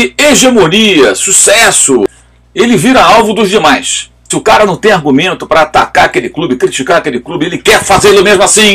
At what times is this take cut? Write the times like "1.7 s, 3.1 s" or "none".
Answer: 2.1 s, 4.3 s